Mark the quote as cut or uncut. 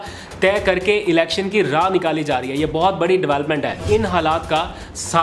cut